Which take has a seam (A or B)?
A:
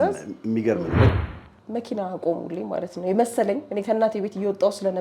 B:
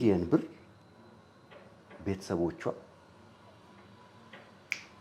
A